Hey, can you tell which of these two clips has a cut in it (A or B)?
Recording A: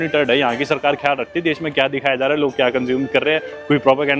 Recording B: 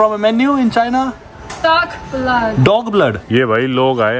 B